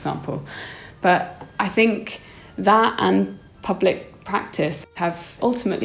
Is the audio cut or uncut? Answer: cut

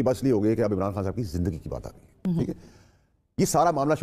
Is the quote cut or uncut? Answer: uncut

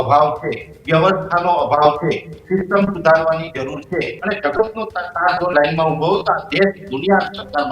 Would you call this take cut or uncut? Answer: cut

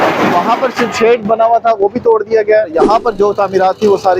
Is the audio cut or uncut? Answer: cut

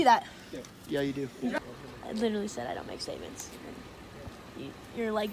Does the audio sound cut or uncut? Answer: cut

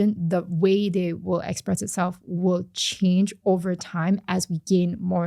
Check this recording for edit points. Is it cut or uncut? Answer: uncut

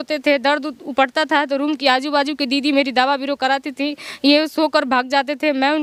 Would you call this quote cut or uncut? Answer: uncut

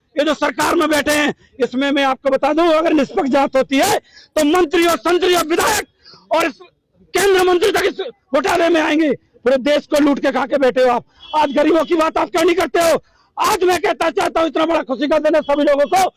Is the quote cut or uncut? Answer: uncut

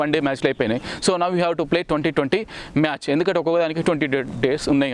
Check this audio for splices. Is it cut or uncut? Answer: uncut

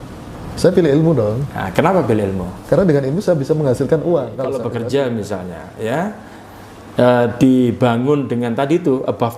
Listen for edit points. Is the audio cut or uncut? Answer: cut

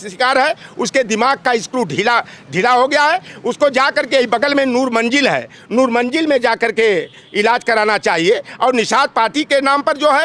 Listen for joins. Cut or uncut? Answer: uncut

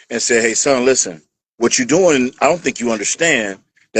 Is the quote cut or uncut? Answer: uncut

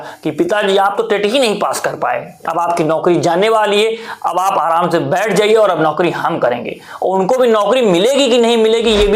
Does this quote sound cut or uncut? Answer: uncut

